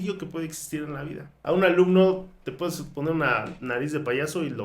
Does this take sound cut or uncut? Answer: cut